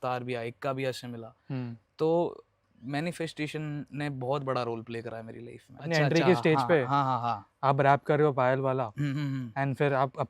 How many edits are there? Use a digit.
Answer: 1